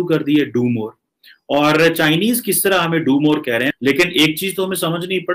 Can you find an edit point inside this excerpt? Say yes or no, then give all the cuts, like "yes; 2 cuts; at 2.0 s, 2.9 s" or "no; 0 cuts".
yes; 1 cut; at 3.7 s